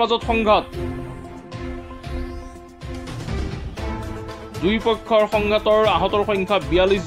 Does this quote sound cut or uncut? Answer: cut